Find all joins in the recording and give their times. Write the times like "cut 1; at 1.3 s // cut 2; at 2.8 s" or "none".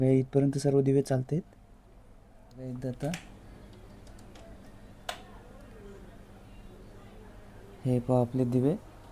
cut 1; at 2.7 s

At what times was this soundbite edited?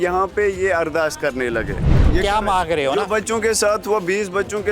cut 1; at 2.0 s

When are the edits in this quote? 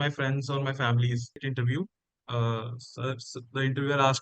cut 1; at 1.4 s

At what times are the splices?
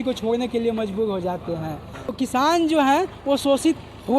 cut 1; at 1.9 s

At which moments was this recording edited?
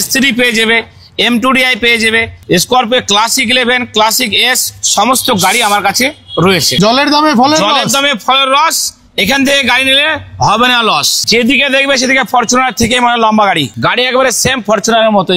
cut 1; at 2.4 s // cut 2; at 6.7 s // cut 3; at 11.3 s

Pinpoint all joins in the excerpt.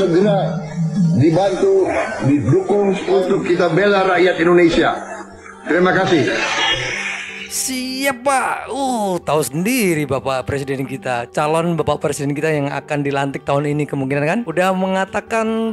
none

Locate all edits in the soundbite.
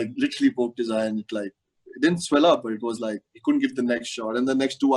none

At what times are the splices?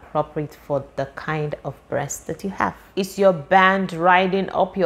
cut 1; at 2.9 s

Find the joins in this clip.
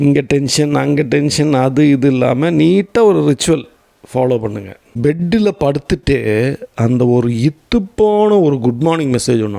cut 1; at 4.8 s

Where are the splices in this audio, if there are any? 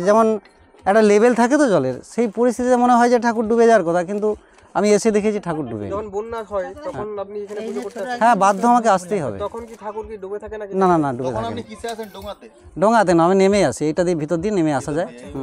none

